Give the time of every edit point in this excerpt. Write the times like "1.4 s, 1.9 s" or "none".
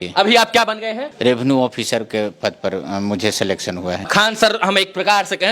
1.1 s, 4.1 s